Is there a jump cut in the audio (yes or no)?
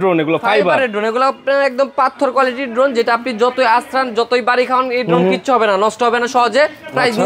no